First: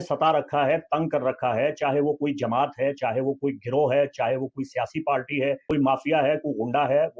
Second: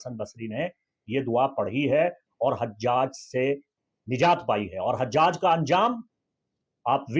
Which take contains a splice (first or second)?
first